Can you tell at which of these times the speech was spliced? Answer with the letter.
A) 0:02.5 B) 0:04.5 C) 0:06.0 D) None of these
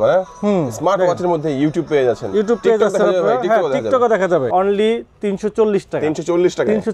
B